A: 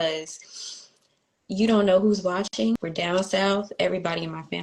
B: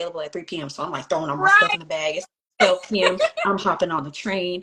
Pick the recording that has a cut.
A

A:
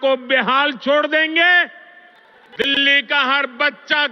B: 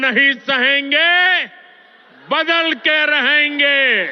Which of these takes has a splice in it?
A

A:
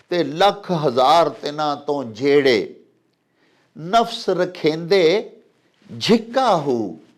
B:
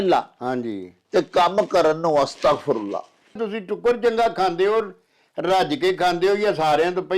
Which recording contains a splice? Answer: B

